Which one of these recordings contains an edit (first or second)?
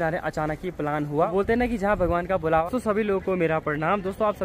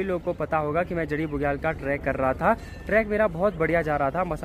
first